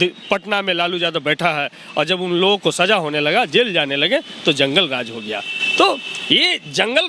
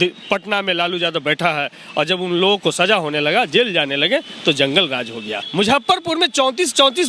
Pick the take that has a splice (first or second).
second